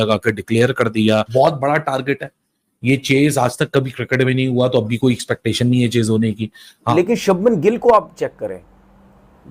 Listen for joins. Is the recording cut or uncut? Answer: cut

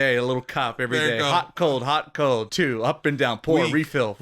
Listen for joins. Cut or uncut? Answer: cut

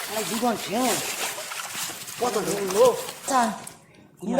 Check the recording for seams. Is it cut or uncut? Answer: cut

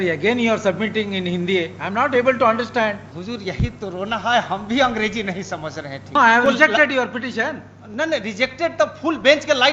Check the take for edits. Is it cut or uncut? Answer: cut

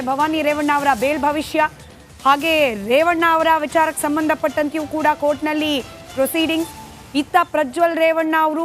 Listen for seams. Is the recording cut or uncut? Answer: cut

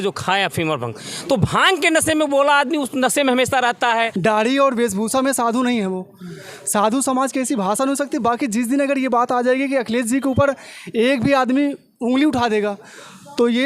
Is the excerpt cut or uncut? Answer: cut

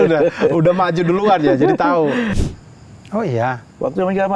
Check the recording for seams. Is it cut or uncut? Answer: cut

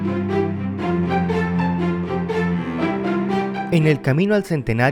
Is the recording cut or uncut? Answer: cut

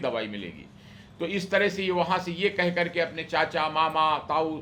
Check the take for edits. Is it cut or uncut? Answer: uncut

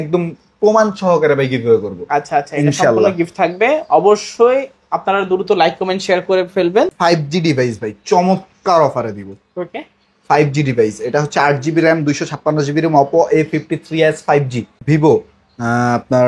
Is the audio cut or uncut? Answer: cut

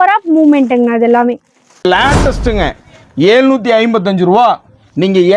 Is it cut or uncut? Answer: cut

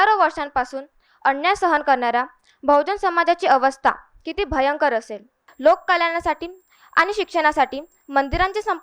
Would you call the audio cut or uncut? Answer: cut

